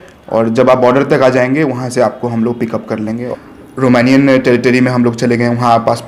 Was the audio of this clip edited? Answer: yes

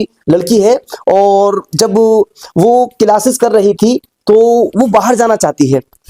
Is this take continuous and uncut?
yes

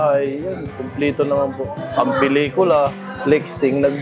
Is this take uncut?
no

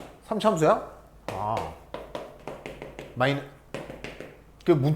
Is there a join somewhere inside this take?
yes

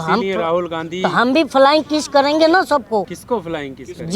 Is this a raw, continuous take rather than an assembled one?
no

